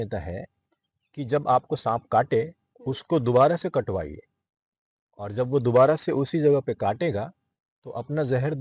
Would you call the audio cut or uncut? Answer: uncut